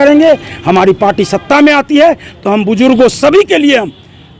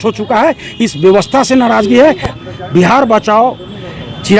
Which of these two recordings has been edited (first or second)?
second